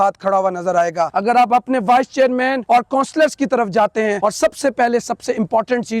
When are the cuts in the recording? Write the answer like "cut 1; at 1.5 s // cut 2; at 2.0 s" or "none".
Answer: cut 1; at 1.1 s // cut 2; at 2.6 s // cut 3; at 4.2 s